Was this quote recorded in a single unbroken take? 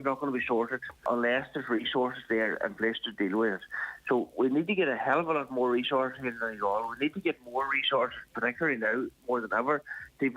no; 1 cut; at 1.0 s

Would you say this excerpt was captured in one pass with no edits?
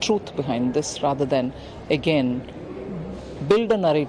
yes; 0 cuts

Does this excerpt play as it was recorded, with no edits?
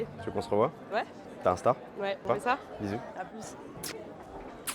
no; 2 cuts; at 1.2 s, 2.2 s

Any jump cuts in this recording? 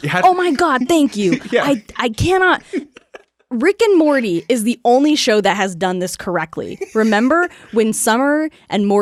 no; 0 cuts

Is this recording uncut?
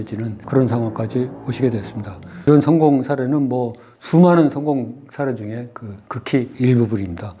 no; 1 cut; at 2.5 s

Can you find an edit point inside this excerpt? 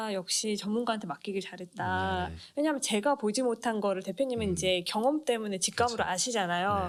no; 0 cuts

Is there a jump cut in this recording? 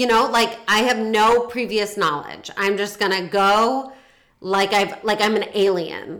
no; 0 cuts

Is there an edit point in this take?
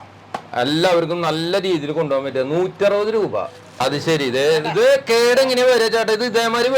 yes; 1 cut; at 3.7 s

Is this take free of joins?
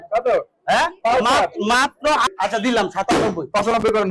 no; 1 cut; at 2.3 s

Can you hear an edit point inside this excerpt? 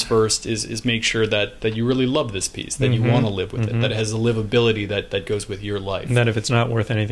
no; 0 cuts

